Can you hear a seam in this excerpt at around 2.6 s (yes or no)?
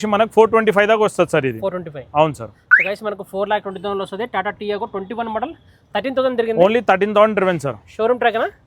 no